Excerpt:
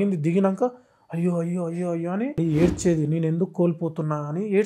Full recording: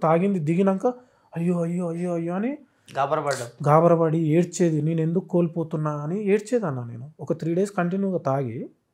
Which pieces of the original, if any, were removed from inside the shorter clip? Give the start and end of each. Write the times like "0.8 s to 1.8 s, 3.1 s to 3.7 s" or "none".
2.6 s to 4.1 s